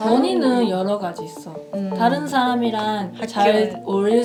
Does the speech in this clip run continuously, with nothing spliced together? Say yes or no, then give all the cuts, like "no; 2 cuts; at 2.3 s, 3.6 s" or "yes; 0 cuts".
yes; 0 cuts